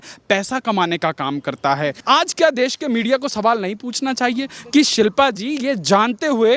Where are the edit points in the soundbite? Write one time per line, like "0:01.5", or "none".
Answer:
0:02.0